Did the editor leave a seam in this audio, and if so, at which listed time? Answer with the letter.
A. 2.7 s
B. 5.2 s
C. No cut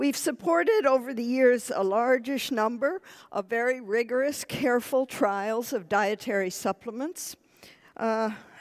A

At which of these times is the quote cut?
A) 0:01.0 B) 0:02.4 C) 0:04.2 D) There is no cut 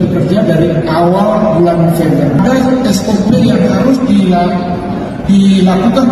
B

